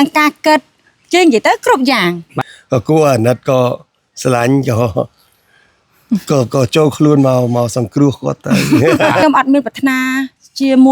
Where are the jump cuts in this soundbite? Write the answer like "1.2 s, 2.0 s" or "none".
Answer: 2.3 s, 9.2 s